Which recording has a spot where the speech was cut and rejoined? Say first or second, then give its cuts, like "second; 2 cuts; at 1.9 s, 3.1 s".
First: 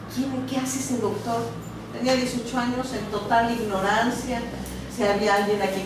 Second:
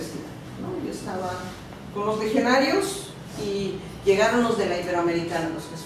second; 1 cut; at 3.2 s